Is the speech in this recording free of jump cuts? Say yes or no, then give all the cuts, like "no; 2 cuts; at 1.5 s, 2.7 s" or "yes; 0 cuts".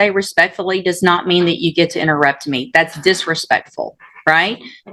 yes; 0 cuts